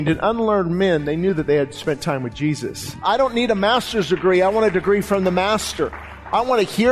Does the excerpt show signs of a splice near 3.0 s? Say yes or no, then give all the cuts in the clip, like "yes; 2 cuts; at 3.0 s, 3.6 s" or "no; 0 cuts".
yes; 1 cut; at 3.0 s